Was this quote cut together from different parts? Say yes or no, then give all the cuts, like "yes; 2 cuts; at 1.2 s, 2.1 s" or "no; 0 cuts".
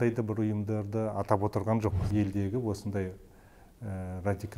yes; 1 cut; at 2.0 s